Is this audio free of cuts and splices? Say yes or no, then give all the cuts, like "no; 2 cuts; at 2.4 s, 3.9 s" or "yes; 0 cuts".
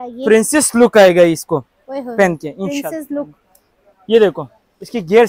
yes; 0 cuts